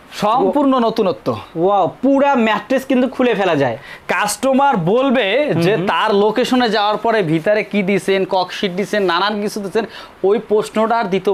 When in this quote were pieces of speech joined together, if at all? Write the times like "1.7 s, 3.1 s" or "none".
none

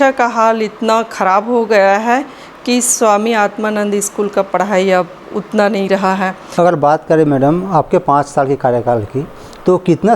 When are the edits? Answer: 6.4 s

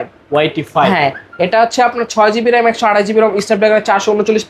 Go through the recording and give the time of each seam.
none

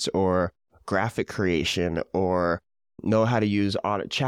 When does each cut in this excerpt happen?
3.0 s

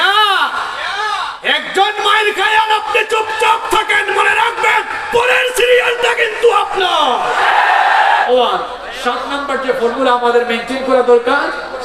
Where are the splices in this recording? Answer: 8.3 s

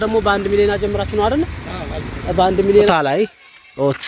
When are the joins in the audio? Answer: 2.9 s

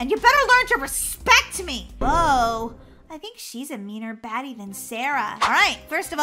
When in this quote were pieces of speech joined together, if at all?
2.0 s, 5.4 s

